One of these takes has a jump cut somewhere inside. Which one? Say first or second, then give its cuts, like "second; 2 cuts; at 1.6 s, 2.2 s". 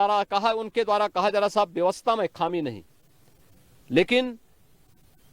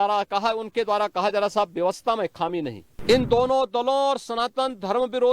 second; 1 cut; at 2.9 s